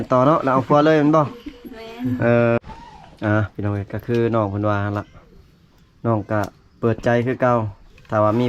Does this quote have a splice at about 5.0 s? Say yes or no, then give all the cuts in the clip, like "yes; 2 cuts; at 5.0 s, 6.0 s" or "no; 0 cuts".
no; 1 cut; at 2.6 s